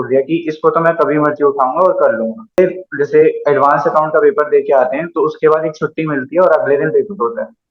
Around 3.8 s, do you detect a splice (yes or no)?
no